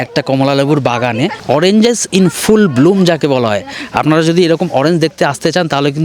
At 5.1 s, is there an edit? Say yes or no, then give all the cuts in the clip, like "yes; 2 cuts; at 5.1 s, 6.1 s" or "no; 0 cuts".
no; 1 cut; at 1.4 s